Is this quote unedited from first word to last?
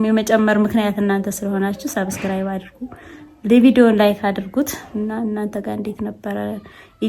no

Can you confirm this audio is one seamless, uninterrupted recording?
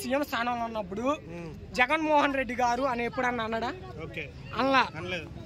yes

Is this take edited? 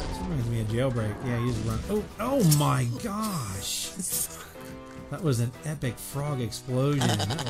no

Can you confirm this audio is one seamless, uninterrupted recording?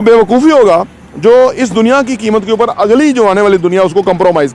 yes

